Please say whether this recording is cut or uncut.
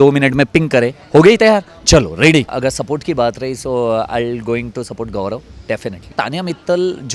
cut